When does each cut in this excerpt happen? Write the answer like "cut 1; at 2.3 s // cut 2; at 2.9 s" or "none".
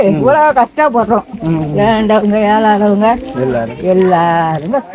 none